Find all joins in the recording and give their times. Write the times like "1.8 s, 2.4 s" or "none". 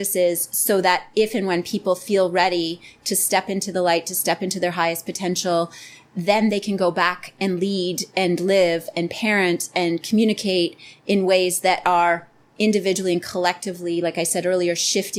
none